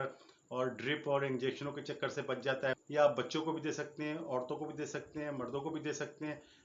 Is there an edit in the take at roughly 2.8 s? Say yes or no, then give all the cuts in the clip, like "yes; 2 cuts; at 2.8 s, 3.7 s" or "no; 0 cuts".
yes; 1 cut; at 2.8 s